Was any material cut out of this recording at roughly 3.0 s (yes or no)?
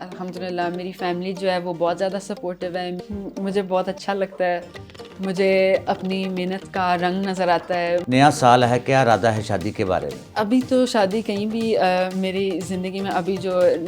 yes